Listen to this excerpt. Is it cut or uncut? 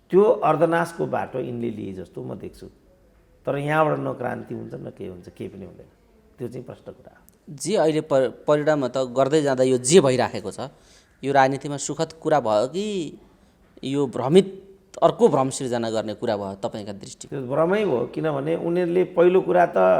uncut